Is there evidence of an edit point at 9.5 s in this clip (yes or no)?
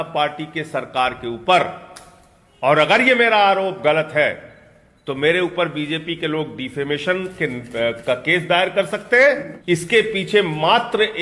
yes